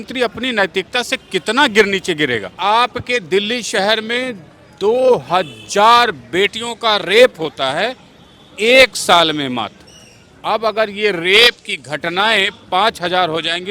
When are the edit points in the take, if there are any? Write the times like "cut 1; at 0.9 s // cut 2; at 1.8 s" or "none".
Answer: cut 1; at 2.6 s